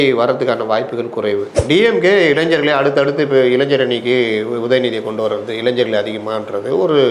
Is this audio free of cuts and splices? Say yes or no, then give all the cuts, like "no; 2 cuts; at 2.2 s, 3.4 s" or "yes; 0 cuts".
no; 1 cut; at 1.5 s